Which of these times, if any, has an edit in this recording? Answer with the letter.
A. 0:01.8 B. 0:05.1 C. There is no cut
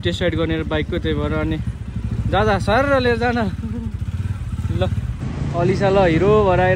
B